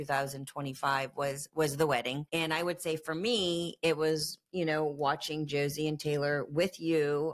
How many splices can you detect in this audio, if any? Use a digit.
1